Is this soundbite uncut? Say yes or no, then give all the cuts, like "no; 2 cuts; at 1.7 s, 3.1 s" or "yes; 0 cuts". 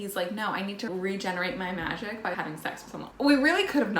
no; 2 cuts; at 0.9 s, 2.5 s